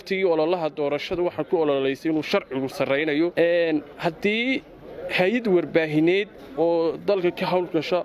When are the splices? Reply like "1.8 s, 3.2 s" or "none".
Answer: 3.3 s, 6.4 s